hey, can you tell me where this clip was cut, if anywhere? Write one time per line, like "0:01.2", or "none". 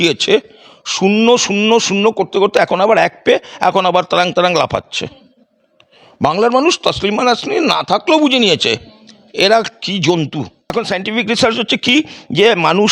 0:10.7